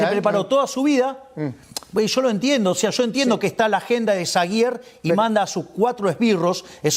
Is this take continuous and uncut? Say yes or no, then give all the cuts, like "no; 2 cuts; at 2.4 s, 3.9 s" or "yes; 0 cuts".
yes; 0 cuts